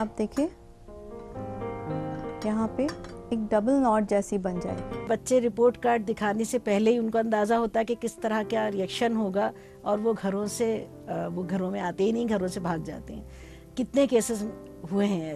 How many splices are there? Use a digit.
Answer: 1